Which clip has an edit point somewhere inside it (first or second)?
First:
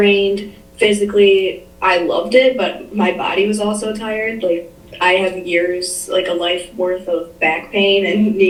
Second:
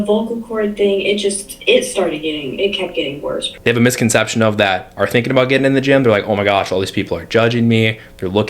second